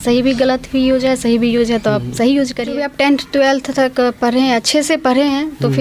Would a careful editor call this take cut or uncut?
cut